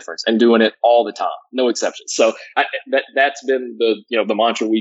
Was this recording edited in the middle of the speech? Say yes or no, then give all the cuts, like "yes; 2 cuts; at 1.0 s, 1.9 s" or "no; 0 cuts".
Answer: no; 0 cuts